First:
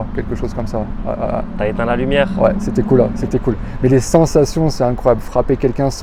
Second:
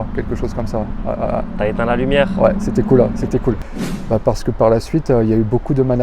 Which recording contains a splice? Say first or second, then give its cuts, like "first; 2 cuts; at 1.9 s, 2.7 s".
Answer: second; 1 cut; at 3.7 s